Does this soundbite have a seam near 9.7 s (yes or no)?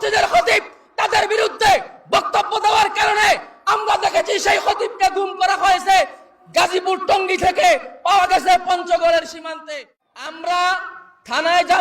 yes